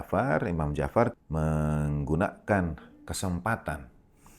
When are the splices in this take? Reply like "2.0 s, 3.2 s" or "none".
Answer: 1.2 s